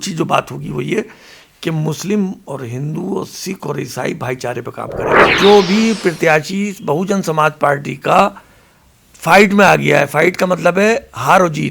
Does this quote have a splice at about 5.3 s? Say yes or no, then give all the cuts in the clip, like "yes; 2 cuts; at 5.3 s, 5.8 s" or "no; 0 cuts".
yes; 1 cut; at 5.3 s